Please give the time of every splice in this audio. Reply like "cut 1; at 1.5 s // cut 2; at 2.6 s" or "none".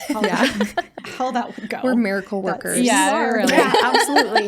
cut 1; at 1.0 s